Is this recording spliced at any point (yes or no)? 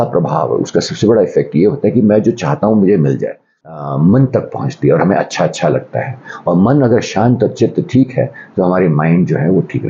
yes